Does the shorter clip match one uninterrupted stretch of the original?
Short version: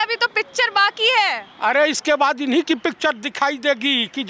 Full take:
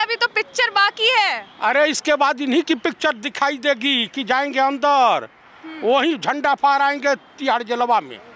yes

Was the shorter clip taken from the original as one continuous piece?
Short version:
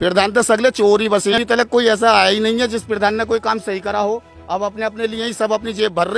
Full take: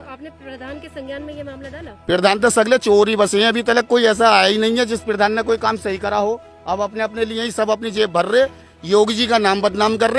no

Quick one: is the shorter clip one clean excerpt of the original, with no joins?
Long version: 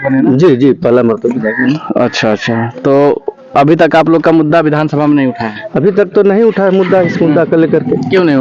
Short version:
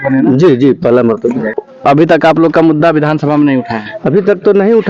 no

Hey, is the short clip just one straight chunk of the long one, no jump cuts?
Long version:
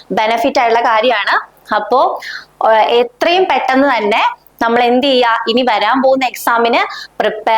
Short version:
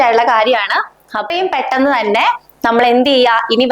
no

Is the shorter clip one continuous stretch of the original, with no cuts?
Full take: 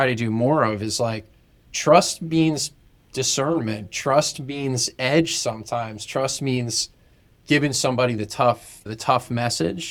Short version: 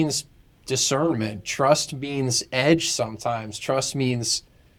yes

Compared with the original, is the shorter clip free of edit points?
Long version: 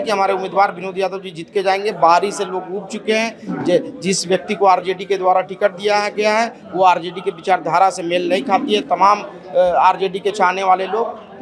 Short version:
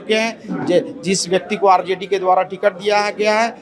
yes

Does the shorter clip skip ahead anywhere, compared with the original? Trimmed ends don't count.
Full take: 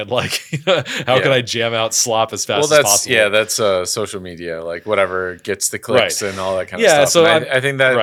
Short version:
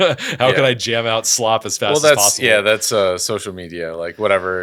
no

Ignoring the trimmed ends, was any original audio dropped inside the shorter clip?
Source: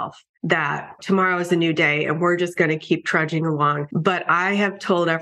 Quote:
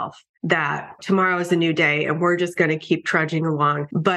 no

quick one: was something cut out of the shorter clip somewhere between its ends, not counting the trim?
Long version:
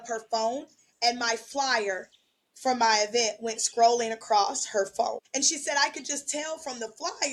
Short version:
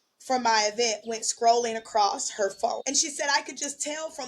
yes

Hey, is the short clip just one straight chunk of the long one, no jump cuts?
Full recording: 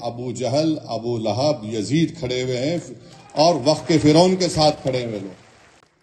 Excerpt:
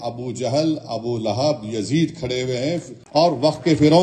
no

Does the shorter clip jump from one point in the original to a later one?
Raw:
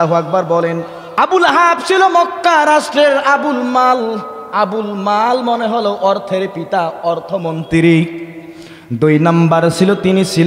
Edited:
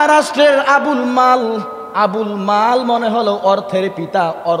no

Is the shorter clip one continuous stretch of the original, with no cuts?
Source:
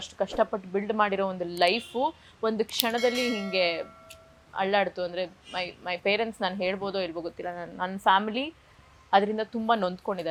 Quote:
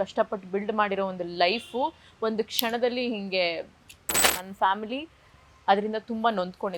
no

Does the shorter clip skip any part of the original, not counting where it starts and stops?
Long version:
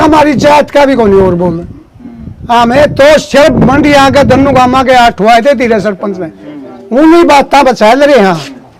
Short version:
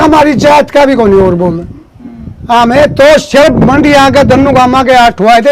no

